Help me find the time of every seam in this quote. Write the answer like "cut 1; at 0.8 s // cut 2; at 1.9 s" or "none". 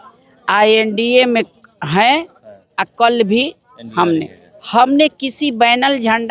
none